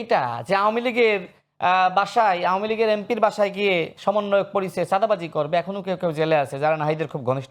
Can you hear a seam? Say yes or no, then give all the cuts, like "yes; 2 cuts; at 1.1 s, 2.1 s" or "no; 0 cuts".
no; 0 cuts